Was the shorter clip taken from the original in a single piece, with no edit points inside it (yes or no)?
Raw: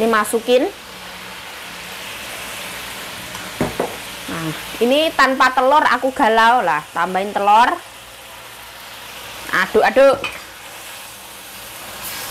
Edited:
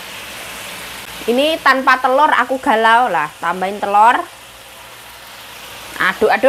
no